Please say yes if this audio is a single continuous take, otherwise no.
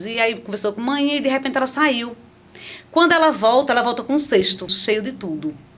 no